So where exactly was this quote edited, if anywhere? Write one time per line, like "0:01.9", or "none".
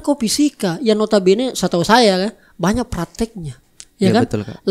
none